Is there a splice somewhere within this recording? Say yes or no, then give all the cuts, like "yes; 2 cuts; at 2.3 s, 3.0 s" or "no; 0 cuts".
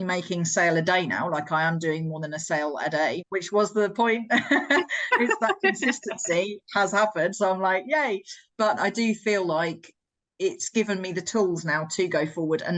no; 0 cuts